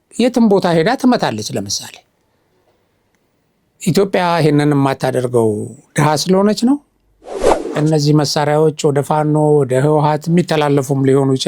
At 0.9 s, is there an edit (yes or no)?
no